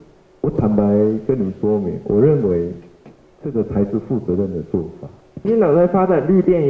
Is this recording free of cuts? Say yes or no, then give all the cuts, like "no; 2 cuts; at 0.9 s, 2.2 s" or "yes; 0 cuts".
no; 1 cut; at 5.3 s